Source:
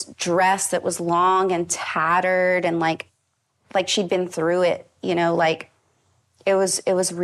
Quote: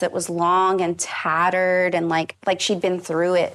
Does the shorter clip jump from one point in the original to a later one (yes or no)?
yes